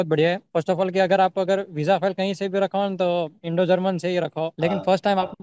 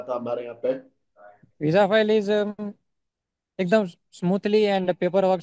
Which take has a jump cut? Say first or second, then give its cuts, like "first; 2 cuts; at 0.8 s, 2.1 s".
first; 1 cut; at 4.5 s